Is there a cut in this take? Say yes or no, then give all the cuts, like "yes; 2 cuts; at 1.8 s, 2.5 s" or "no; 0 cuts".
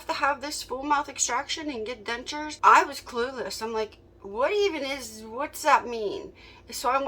no; 0 cuts